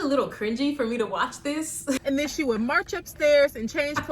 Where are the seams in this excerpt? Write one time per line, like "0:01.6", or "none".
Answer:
0:02.0